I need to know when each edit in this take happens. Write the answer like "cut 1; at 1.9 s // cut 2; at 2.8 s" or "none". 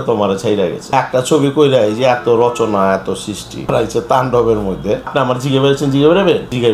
cut 1; at 0.9 s // cut 2; at 3.7 s // cut 3; at 5.1 s